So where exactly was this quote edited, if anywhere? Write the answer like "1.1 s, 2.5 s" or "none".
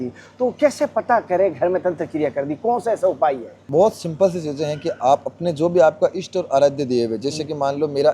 3.5 s